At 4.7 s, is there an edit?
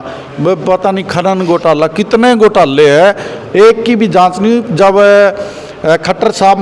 no; 0 cuts

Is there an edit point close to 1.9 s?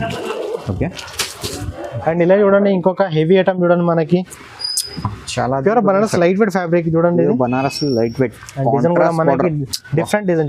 yes; 1 cut; at 1.9 s

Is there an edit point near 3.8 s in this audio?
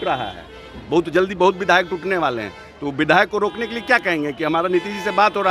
no; 0 cuts

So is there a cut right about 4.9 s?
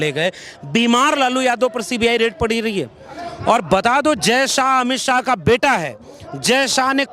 no; 0 cuts

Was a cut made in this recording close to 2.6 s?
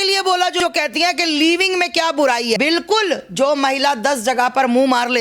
yes; 1 cut; at 2.6 s

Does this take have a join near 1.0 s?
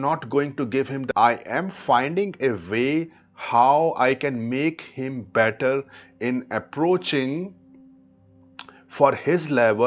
yes; 1 cut; at 1.0 s

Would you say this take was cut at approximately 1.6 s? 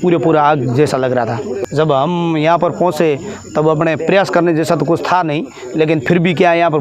yes; 1 cut; at 1.6 s

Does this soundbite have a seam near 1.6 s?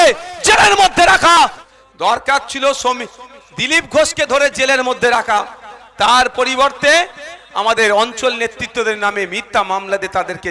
yes; 1 cut; at 1.6 s

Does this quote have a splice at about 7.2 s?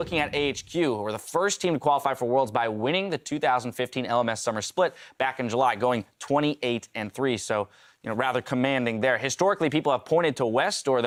no; 0 cuts

